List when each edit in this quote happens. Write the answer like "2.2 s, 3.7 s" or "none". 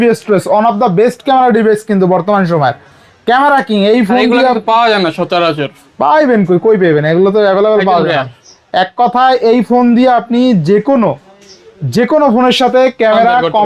none